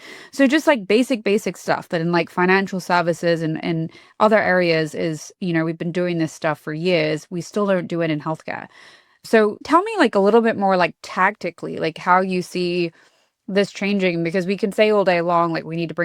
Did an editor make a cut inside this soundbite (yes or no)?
no